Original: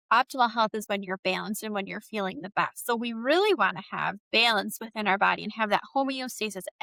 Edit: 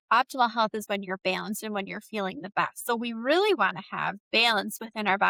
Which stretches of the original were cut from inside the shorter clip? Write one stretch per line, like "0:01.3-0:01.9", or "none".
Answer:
none